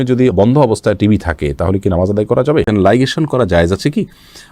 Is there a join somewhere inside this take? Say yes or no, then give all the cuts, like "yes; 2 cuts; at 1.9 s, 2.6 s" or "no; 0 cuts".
yes; 1 cut; at 2.7 s